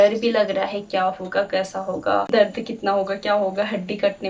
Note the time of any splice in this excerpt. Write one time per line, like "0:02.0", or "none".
0:02.3

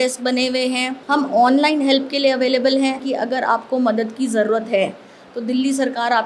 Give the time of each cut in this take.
0:00.9
0:03.0

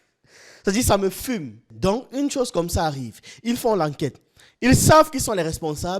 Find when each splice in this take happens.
0:01.6

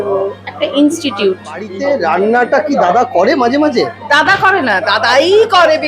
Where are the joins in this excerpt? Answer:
0:01.7

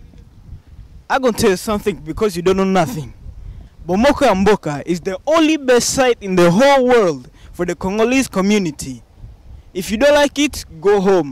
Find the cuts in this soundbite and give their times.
none

